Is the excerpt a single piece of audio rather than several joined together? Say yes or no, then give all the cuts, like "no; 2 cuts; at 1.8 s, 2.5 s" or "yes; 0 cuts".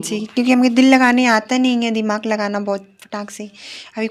yes; 0 cuts